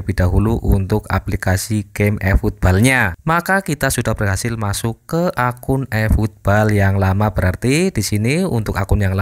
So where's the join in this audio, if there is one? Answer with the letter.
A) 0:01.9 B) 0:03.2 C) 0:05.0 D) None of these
B